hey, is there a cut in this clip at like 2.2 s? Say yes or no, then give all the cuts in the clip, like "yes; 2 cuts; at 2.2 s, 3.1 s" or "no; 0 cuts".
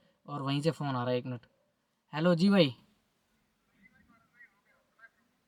no; 0 cuts